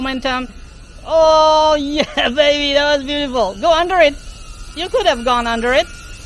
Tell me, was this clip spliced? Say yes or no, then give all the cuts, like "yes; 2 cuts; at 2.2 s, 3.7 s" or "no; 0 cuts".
no; 0 cuts